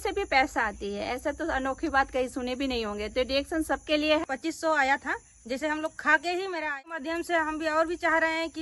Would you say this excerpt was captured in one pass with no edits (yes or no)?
no